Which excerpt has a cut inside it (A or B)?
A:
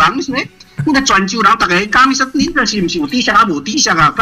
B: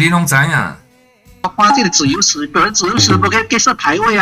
B